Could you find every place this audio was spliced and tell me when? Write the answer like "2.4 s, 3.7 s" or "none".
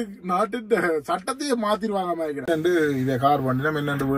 2.4 s

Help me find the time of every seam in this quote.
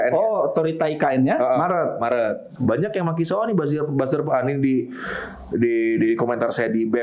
2.5 s

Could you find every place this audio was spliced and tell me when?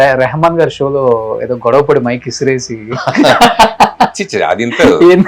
none

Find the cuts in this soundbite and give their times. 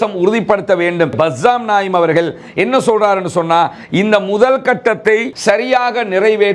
1.1 s, 5.3 s

